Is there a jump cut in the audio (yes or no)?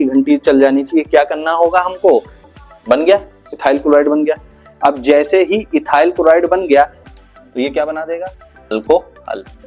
yes